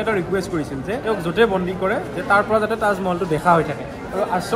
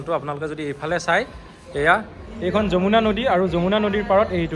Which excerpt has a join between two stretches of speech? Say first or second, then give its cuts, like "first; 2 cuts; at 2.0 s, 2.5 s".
first; 1 cut; at 0.9 s